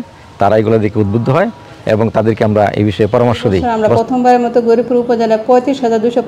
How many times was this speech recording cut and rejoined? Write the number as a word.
one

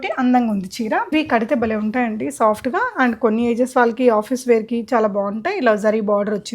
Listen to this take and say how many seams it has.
one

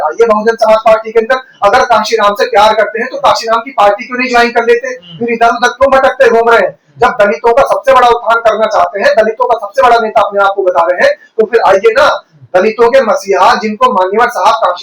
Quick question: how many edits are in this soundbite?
zero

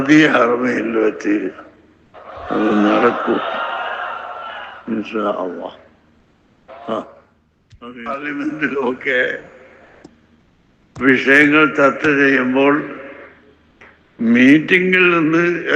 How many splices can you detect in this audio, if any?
one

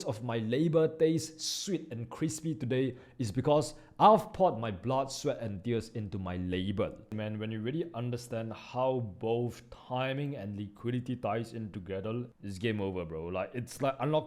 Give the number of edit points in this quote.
two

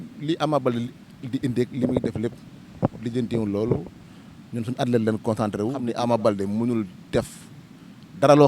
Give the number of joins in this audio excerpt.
one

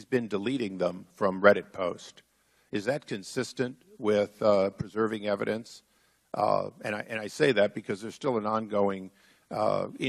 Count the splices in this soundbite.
one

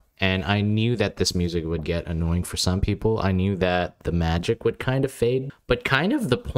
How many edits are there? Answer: one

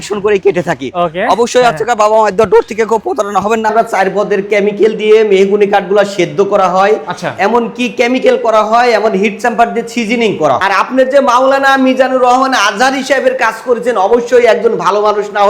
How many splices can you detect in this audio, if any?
two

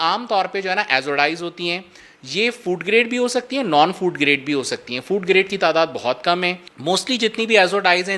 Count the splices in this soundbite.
one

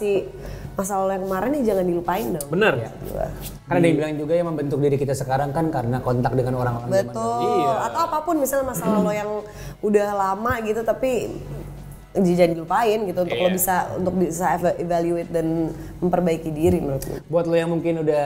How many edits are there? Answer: zero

